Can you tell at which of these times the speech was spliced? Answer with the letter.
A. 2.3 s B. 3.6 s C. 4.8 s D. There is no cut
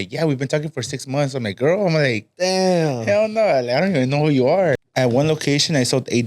C